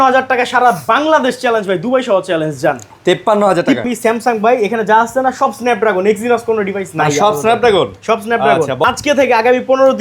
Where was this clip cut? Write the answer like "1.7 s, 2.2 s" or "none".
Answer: 3.8 s, 8.8 s